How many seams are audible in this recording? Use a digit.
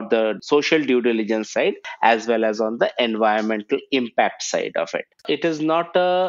1